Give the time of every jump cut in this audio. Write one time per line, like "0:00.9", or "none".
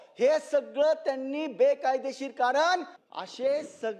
0:03.0